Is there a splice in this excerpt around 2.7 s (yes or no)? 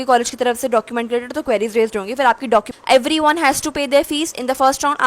yes